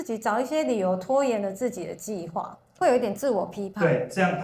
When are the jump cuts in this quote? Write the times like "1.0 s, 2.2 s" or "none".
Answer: 2.7 s